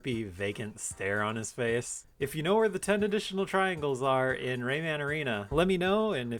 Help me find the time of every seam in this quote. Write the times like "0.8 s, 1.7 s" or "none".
2.0 s, 5.4 s